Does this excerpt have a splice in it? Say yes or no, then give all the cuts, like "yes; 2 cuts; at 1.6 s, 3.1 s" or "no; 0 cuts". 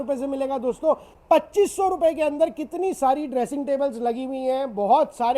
yes; 1 cut; at 1.1 s